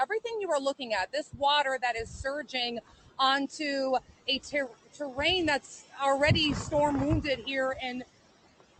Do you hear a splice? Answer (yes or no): no